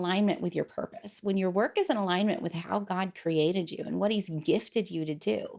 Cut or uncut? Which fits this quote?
uncut